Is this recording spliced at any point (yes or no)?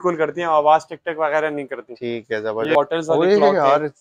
yes